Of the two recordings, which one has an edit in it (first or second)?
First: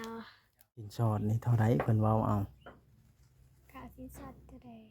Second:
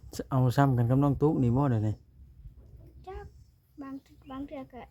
first